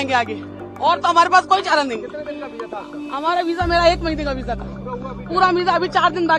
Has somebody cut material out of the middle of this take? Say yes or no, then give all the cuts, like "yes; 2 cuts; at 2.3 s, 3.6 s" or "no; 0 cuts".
no; 0 cuts